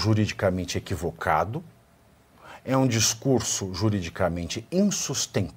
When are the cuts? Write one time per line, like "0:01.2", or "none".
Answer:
none